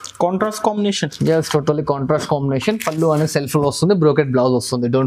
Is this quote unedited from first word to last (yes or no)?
yes